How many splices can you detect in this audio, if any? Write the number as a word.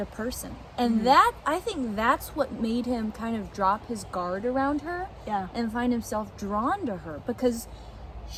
zero